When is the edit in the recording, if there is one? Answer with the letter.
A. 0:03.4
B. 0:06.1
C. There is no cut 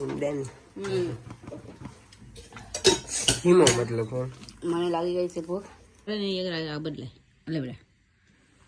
B